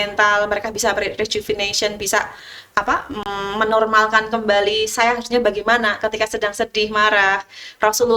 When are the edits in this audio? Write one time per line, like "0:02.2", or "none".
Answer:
none